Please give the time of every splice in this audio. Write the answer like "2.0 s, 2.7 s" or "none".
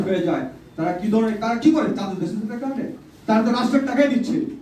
none